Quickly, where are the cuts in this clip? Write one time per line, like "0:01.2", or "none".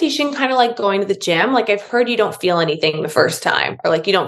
none